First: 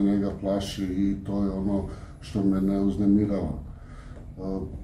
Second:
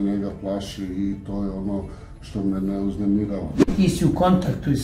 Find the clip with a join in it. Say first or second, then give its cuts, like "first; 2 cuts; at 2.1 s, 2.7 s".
second; 1 cut; at 3.6 s